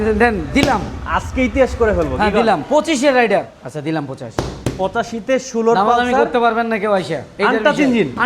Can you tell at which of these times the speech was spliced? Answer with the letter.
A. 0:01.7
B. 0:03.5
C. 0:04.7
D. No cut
B